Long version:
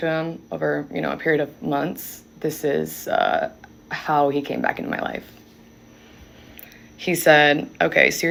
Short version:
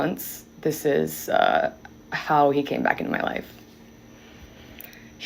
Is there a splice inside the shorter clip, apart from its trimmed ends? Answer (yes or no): no